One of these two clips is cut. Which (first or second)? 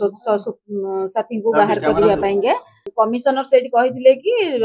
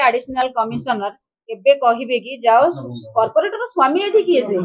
first